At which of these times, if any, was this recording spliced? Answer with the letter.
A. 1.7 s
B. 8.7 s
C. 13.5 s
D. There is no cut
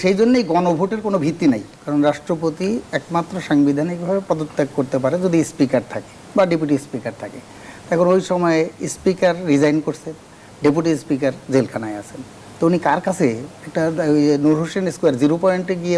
A